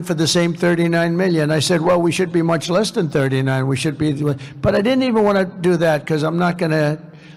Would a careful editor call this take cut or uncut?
uncut